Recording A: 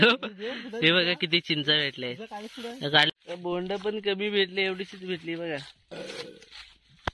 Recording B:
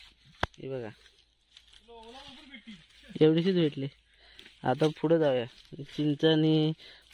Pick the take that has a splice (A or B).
A